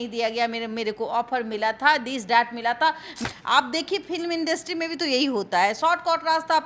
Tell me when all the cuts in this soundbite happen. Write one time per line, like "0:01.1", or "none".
0:03.2